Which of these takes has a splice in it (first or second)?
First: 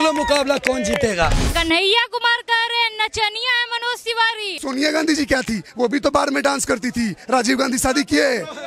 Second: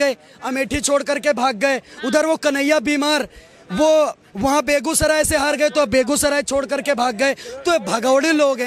first